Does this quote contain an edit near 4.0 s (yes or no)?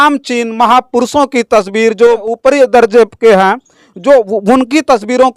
no